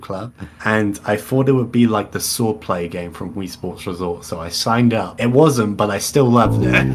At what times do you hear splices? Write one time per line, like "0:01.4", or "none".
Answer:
none